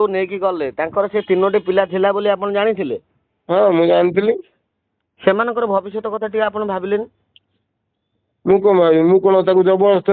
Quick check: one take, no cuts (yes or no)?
yes